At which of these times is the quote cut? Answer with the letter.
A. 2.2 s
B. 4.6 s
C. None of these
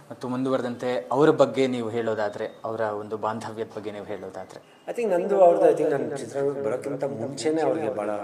B